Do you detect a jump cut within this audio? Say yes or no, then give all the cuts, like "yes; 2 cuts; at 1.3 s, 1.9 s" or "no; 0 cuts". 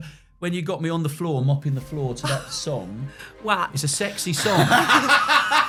no; 0 cuts